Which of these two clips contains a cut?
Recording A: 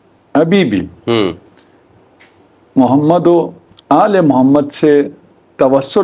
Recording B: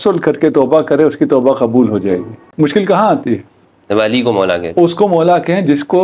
B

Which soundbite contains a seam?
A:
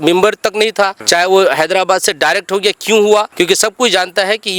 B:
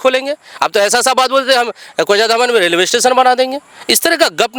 A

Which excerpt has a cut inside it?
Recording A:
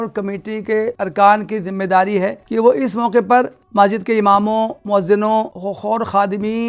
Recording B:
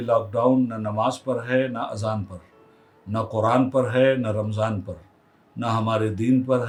A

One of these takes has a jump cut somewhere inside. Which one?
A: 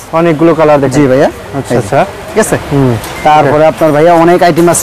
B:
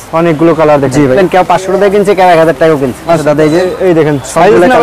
B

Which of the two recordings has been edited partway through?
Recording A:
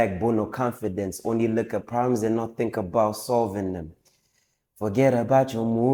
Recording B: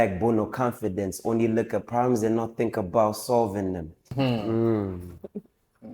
B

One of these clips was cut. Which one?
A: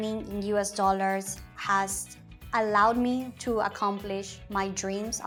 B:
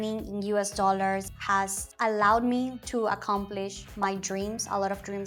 B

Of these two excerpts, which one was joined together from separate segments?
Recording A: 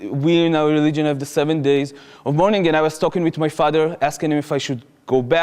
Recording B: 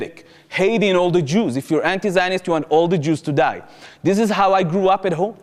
A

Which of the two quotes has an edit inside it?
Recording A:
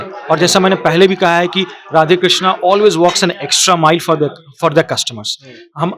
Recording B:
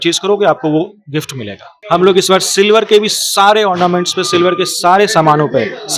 B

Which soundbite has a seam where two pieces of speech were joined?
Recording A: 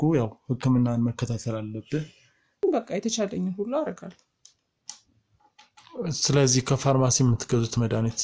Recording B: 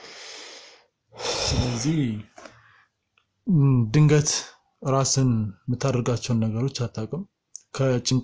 A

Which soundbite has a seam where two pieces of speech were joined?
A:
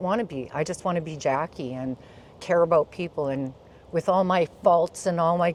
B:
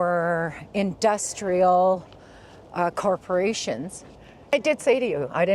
B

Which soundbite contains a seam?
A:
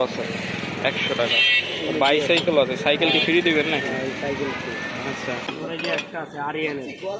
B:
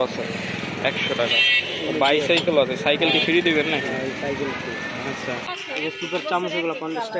A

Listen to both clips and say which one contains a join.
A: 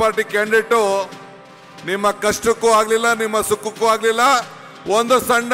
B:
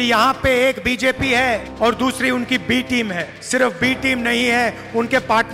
B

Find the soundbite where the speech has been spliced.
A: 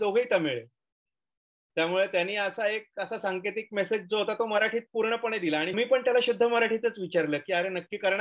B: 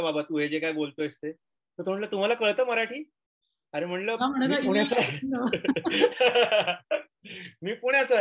A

